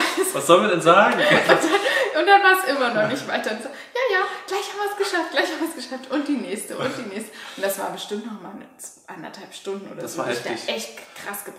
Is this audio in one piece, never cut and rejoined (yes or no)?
yes